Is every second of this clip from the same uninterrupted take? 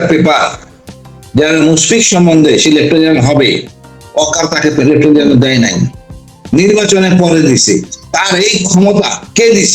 yes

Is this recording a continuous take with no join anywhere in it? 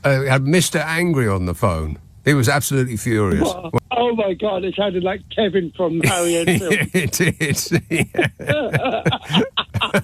no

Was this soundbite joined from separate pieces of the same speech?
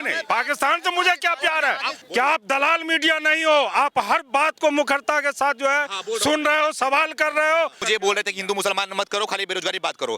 yes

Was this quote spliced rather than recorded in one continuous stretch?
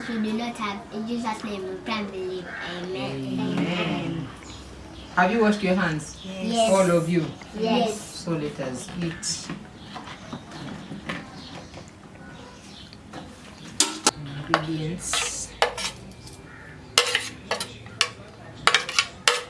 yes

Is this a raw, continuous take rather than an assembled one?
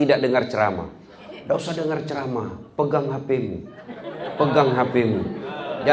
yes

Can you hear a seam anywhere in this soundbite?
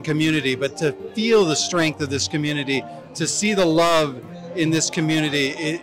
no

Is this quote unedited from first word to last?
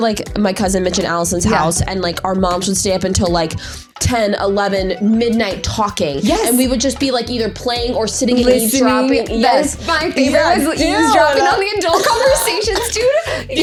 yes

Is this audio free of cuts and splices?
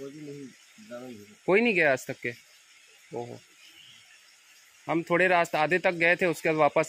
yes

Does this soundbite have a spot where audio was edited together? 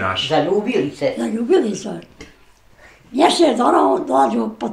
no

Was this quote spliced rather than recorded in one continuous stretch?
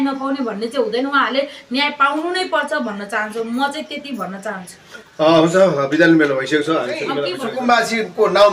yes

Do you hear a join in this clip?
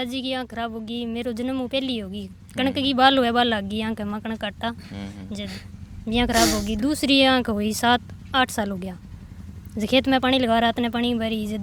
no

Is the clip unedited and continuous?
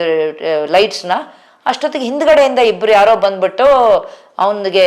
yes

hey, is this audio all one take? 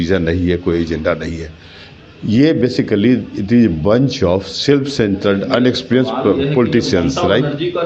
yes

